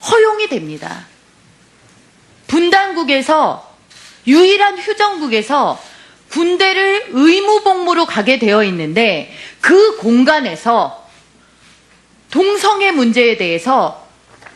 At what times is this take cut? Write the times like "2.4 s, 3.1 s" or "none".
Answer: 13.3 s